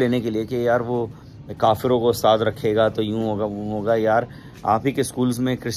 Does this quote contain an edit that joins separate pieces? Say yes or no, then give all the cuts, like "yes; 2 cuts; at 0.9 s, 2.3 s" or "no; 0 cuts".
no; 0 cuts